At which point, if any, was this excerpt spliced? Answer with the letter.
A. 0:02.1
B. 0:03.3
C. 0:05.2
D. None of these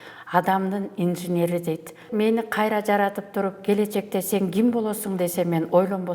A